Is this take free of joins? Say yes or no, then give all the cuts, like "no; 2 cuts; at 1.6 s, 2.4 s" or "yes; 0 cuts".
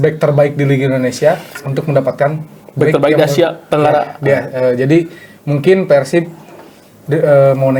yes; 0 cuts